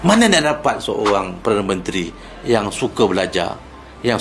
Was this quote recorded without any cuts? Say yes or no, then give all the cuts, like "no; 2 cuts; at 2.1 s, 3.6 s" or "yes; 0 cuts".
yes; 0 cuts